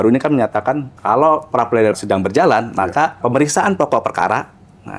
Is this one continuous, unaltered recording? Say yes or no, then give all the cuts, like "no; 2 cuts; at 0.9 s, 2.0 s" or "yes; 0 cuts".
no; 1 cut; at 0.9 s